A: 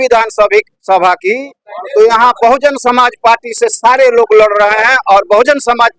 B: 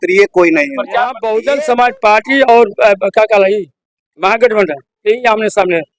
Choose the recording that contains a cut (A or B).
B